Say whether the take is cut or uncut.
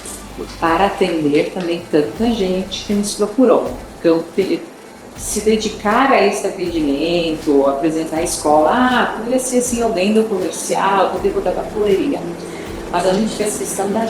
uncut